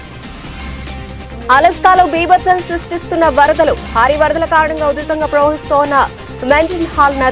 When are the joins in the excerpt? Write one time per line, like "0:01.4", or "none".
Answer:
0:00.9

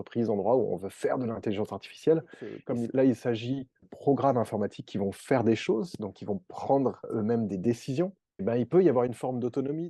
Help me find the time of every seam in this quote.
0:02.5
0:03.9
0:07.1
0:08.4

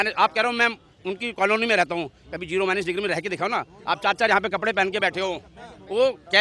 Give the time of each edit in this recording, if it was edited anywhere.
none

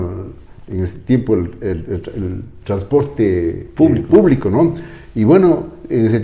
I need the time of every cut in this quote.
none

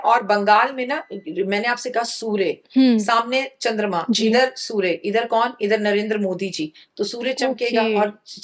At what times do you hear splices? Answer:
none

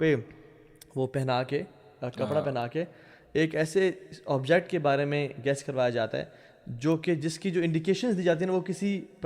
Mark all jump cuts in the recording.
none

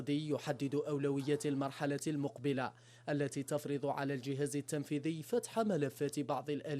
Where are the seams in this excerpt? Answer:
none

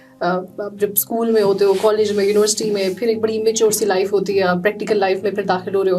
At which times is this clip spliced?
none

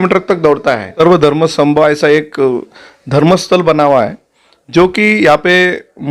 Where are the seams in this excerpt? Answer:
0:01.0

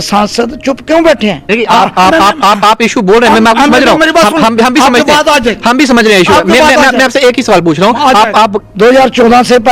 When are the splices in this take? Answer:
0:01.4
0:08.6

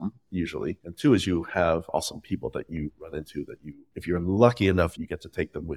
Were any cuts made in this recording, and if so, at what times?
none

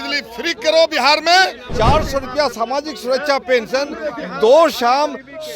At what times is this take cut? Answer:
0:01.6

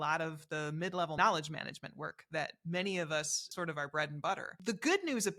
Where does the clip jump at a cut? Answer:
0:01.2
0:03.4
0:04.5

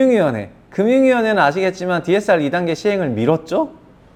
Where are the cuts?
none

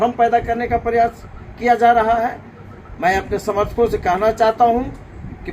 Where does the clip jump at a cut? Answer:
none

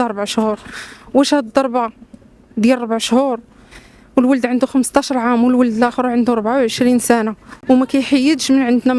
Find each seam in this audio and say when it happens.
none

